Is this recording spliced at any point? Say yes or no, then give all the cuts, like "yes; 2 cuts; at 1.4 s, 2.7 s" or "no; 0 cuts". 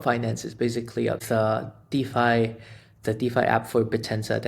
yes; 1 cut; at 1.2 s